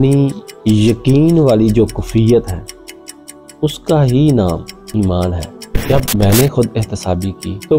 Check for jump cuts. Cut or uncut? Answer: cut